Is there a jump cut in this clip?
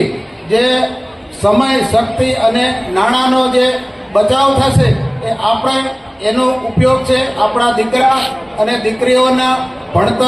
no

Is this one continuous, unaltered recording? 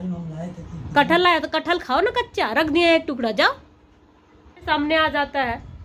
no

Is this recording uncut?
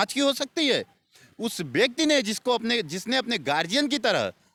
yes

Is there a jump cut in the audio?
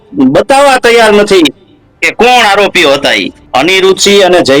yes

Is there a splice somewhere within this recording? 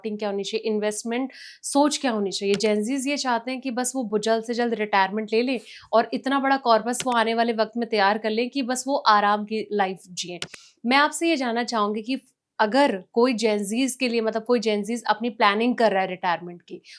no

